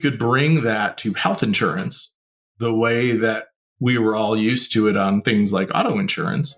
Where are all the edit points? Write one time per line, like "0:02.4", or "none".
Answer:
none